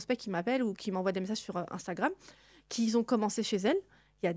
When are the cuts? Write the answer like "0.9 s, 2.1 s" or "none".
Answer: none